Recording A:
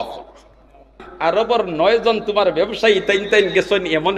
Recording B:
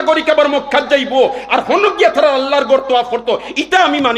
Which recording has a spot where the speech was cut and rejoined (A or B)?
A